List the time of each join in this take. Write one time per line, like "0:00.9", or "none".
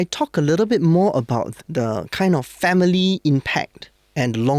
0:01.5